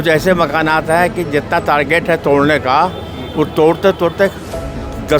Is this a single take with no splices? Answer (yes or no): yes